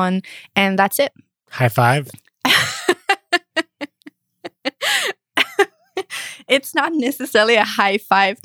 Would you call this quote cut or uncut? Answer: uncut